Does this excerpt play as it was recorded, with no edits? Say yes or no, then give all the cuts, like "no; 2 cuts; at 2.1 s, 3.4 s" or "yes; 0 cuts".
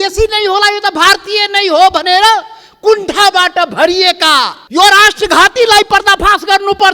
no; 1 cut; at 4.6 s